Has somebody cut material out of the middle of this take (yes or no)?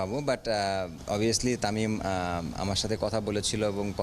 yes